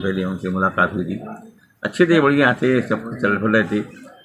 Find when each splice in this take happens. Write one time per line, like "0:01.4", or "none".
none